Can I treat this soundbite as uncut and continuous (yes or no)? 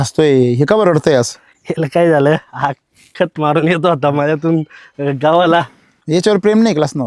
yes